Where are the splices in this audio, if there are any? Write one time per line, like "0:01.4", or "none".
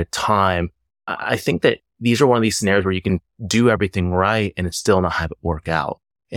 0:03.1